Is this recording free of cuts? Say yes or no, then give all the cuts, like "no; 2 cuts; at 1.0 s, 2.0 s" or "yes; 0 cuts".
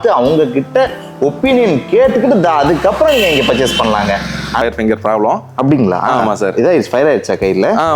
no; 1 cut; at 4.6 s